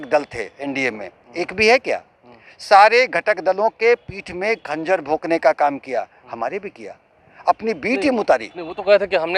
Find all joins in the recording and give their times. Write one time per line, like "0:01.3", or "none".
none